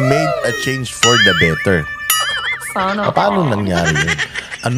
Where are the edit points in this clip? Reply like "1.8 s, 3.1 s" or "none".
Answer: none